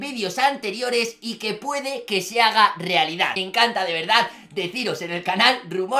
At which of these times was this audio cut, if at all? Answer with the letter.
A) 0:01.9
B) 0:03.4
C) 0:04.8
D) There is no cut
B